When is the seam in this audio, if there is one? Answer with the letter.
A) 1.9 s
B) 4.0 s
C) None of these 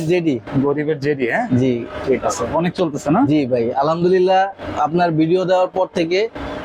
A